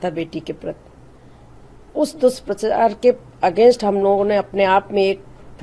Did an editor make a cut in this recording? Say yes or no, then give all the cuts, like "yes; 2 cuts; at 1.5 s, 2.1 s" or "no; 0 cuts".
no; 0 cuts